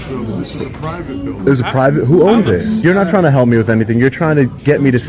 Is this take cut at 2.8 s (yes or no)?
yes